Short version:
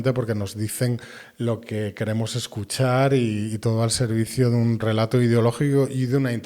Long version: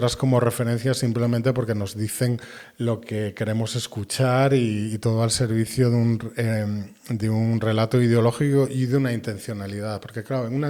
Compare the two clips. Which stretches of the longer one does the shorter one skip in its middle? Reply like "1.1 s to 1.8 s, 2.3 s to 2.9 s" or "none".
6.2 s to 7.6 s